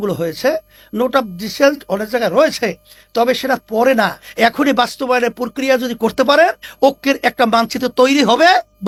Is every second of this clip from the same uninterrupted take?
yes; 0 cuts

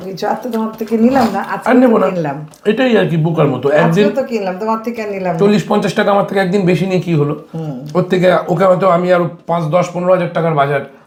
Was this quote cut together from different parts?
no; 0 cuts

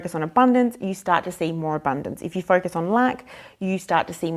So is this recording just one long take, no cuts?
yes; 0 cuts

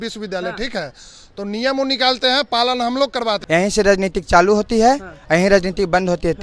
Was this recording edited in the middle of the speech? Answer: yes; 1 cut; at 3.4 s

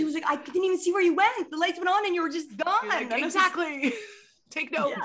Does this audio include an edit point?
no; 0 cuts

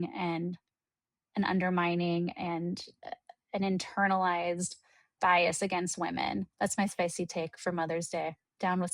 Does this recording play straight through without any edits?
no; 1 cut; at 6.5 s

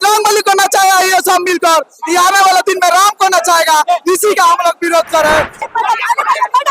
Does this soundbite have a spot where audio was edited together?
yes; 1 cut; at 5.7 s

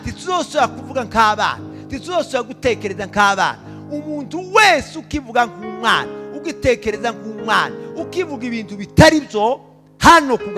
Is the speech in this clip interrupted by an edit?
no; 0 cuts

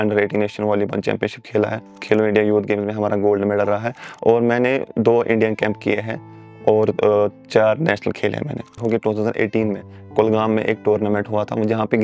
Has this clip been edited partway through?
yes; 2 cuts; at 2.0 s, 8.8 s

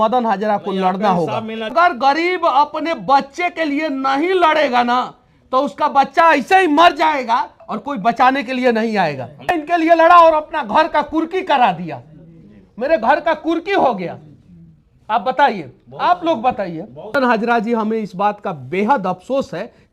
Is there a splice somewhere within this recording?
yes; 3 cuts; at 1.7 s, 9.5 s, 17.1 s

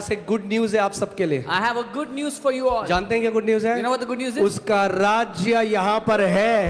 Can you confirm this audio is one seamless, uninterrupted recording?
yes; 0 cuts

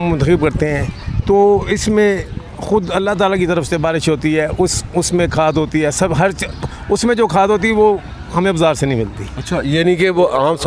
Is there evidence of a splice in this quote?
no; 0 cuts

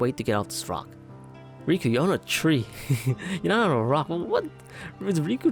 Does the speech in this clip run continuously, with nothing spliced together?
yes; 0 cuts

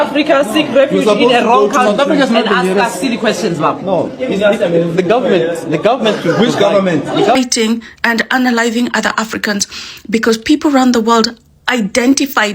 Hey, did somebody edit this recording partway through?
yes; 1 cut; at 7.3 s

